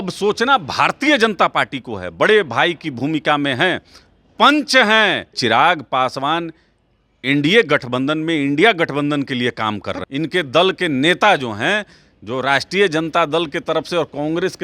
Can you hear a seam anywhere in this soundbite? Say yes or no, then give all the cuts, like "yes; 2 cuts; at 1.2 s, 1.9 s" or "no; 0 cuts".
yes; 2 cuts; at 5.4 s, 9.9 s